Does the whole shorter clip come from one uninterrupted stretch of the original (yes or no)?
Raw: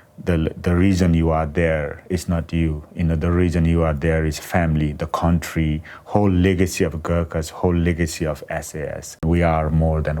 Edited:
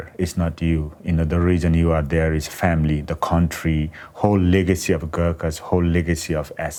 yes